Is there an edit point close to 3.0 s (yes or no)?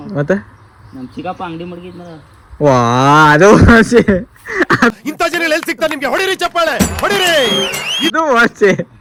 no